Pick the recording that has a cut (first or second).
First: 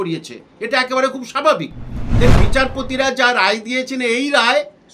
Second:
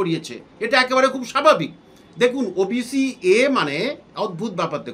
first